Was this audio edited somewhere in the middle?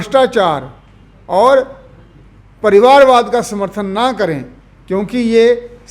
no; 0 cuts

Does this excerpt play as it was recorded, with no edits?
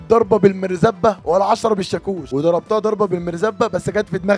no; 1 cut; at 2.2 s

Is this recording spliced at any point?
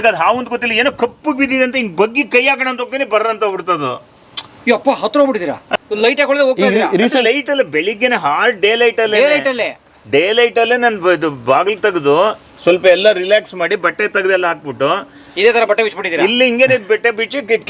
no; 0 cuts

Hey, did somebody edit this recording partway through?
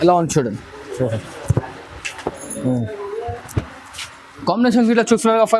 no; 0 cuts

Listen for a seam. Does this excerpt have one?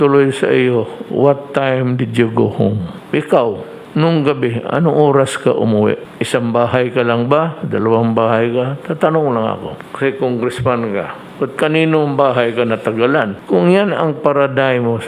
yes; 6 cuts; at 2.9 s, 3.7 s, 6.1 s, 9.8 s, 11.2 s, 13.4 s

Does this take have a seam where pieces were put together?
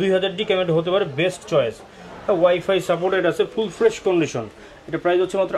no; 0 cuts

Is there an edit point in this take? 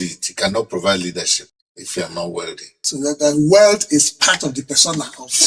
yes; 1 cut; at 2.8 s

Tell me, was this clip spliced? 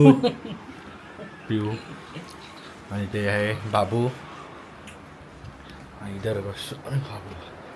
no; 0 cuts

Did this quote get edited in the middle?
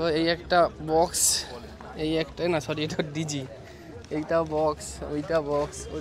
no; 0 cuts

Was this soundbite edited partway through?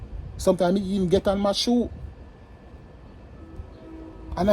no; 0 cuts

